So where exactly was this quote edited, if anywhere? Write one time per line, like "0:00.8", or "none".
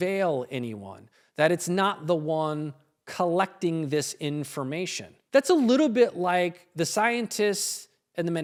none